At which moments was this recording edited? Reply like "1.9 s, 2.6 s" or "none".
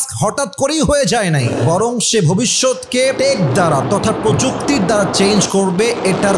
1.5 s, 3.2 s